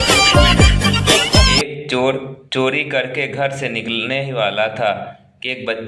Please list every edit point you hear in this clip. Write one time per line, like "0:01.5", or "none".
0:01.4